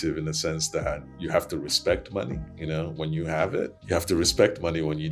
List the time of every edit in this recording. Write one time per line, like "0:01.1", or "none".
0:02.5
0:03.8